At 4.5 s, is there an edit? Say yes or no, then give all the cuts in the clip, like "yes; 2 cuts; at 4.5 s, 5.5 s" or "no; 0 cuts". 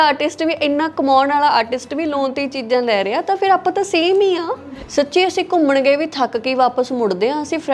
yes; 1 cut; at 4.5 s